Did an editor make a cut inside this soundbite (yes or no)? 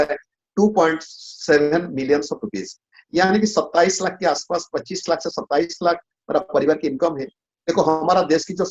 yes